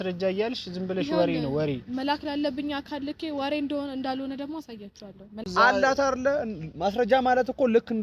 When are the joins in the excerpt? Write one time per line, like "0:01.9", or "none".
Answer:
0:05.5